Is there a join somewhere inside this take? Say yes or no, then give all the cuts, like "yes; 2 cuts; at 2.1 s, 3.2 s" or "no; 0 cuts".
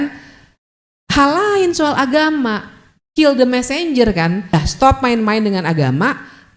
yes; 1 cut; at 4.5 s